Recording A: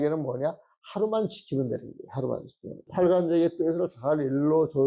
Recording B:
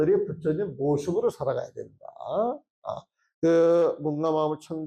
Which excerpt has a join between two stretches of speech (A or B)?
A